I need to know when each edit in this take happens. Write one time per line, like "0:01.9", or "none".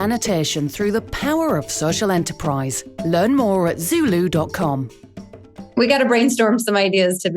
0:05.8